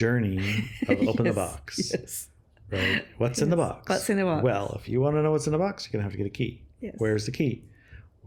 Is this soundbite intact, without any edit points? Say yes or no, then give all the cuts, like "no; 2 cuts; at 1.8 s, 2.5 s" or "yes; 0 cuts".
yes; 0 cuts